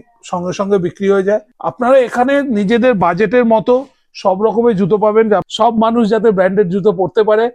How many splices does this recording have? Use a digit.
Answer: 2